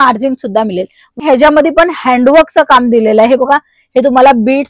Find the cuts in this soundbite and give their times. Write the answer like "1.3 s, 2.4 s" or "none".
1.2 s